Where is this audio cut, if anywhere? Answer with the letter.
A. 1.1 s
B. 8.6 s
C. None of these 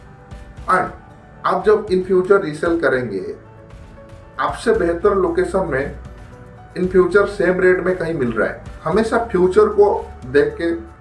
B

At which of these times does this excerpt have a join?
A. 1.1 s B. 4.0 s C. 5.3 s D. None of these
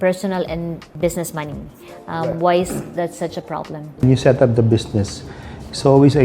B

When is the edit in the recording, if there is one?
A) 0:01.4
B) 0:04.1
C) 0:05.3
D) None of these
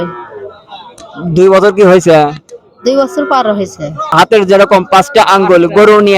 B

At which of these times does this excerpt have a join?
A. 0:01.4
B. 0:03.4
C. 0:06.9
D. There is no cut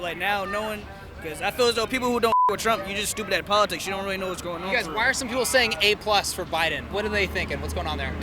C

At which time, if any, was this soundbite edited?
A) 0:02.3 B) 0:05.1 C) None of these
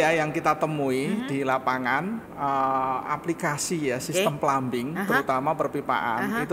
A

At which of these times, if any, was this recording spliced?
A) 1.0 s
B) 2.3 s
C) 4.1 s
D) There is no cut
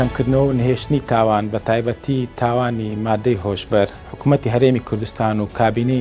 C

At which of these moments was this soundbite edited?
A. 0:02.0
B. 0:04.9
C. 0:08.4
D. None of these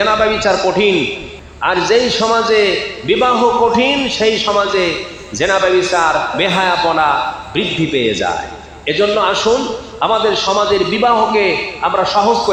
D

